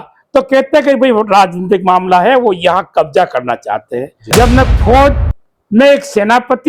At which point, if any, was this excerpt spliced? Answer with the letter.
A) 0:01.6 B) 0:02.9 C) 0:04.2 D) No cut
C